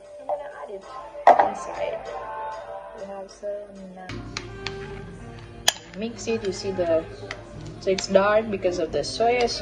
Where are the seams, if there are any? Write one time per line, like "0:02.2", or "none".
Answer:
0:04.1